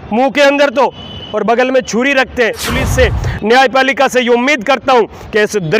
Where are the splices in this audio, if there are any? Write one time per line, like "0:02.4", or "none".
0:02.7